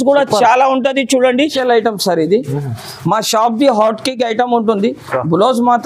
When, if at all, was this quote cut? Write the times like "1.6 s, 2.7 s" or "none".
1.6 s